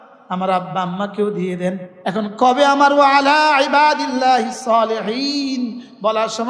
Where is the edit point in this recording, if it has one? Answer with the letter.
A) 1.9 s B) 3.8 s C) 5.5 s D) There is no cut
A